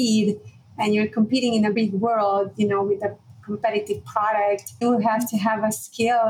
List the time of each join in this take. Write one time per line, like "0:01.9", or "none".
0:01.7
0:04.8